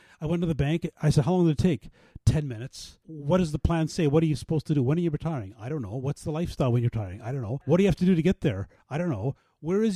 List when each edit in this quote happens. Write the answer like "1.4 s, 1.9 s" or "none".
7.7 s